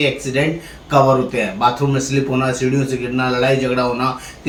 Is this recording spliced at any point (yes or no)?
no